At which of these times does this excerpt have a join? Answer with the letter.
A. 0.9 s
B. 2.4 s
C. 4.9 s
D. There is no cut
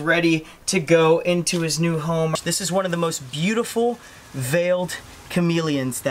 B